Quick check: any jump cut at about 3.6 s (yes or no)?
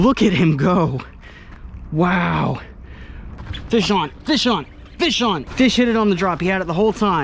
yes